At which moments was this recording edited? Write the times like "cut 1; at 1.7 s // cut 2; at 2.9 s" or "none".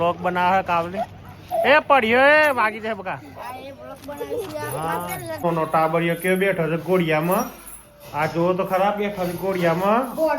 cut 1; at 5.4 s